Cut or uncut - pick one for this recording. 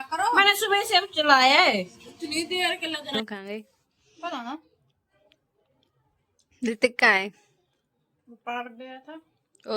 cut